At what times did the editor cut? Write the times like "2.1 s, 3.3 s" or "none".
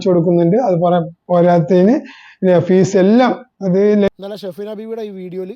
4.1 s

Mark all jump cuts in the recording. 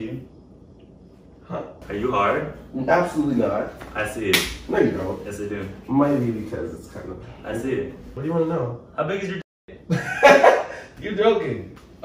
1.7 s, 8.1 s

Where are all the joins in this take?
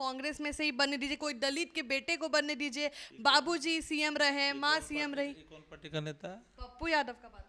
none

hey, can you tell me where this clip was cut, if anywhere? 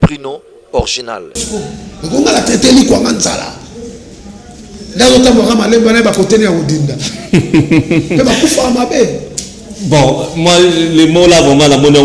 1.4 s

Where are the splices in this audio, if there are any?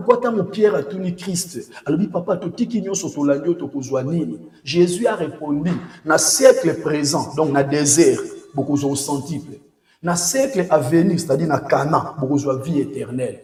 none

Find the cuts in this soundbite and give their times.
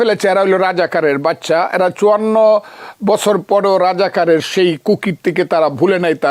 none

